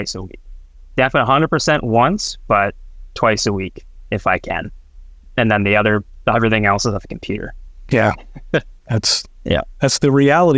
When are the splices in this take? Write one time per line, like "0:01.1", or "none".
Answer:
none